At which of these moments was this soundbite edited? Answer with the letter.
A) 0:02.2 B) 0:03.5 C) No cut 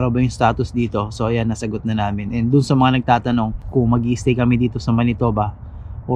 B